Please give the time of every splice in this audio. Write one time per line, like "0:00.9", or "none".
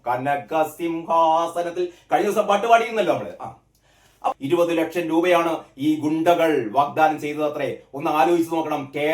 0:04.3